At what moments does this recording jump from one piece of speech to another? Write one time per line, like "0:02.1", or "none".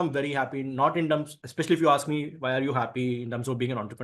none